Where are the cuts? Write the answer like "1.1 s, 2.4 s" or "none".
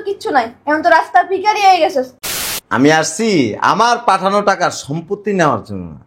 2.2 s